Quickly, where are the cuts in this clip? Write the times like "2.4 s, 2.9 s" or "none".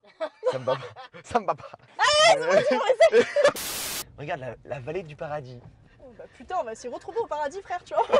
1.8 s, 3.7 s